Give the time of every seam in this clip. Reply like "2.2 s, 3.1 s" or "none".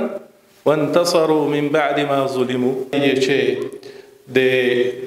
2.8 s